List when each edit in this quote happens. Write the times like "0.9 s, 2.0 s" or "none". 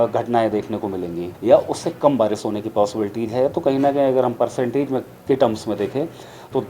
1.3 s